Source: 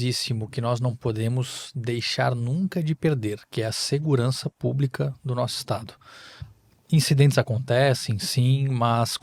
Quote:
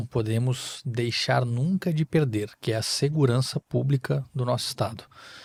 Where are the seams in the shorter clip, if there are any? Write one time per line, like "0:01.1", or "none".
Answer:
none